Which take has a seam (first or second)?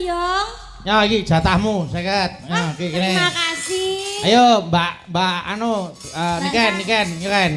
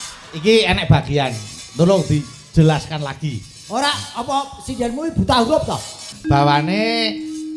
second